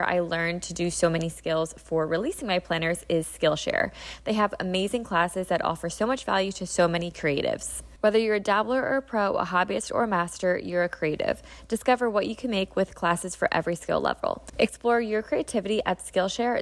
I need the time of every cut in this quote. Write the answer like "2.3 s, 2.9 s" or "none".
7.8 s, 14.4 s